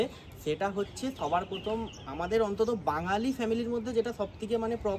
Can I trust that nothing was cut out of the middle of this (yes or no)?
yes